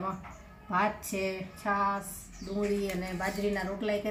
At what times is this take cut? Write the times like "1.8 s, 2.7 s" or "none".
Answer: none